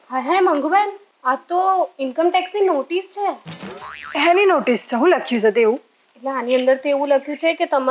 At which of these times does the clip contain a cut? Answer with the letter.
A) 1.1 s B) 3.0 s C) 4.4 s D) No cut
A